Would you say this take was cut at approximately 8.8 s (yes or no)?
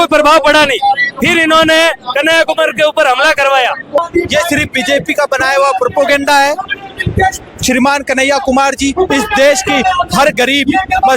no